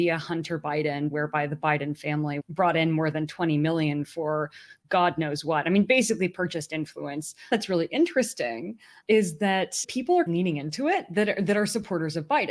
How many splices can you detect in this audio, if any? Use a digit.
3